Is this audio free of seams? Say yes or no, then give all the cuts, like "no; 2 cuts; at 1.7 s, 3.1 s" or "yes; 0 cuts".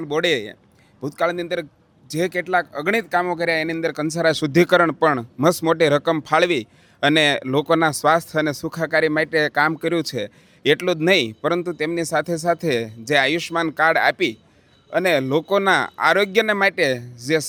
yes; 0 cuts